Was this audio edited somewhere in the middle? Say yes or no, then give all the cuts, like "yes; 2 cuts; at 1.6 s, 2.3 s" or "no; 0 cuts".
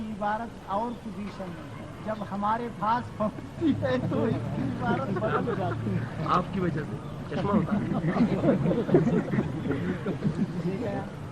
no; 0 cuts